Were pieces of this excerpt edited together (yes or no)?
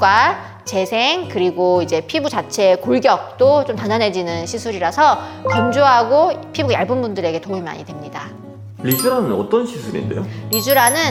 no